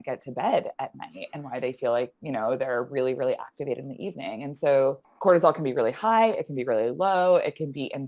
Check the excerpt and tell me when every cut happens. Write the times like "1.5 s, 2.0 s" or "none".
5.1 s